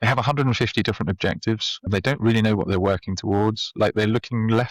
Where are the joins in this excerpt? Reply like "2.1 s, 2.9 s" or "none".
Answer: 1.9 s